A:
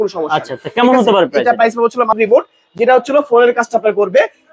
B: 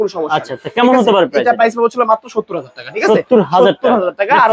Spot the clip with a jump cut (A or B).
A